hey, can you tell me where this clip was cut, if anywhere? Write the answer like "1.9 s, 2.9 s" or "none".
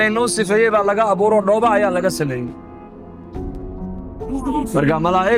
none